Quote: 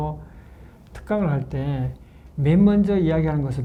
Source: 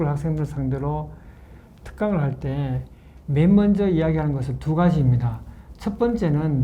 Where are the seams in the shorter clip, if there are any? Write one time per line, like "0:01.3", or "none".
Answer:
none